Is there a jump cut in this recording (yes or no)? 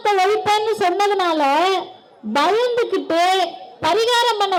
no